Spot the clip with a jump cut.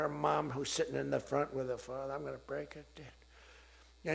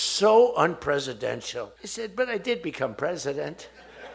second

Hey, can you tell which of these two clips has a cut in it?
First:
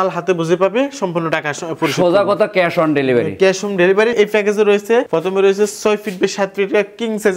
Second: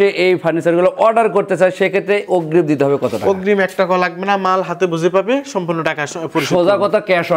first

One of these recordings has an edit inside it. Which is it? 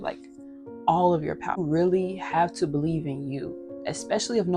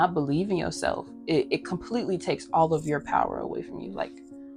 first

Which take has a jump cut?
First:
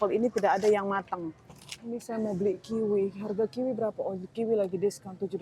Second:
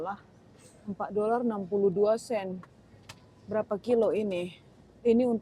first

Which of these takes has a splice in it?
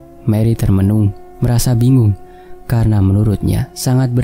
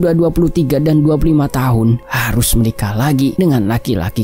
second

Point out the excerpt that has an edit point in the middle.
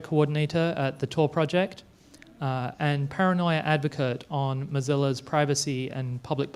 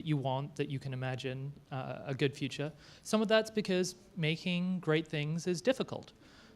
second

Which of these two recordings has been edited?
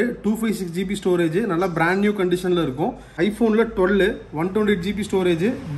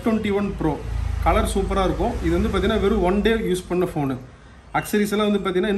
first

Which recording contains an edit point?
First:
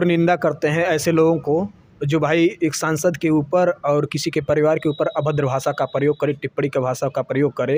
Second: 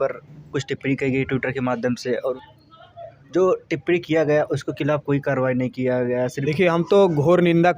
second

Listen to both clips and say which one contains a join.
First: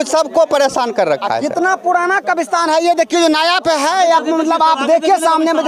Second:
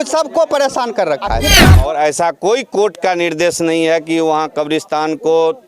second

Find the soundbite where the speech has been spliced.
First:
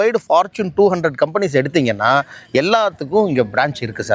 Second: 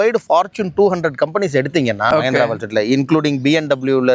second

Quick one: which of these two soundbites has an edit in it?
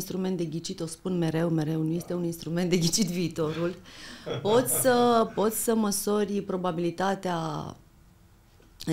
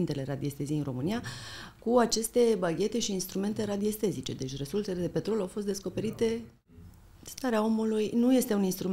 second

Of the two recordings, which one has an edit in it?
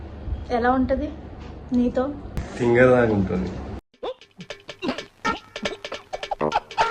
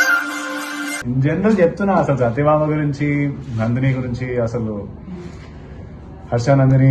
second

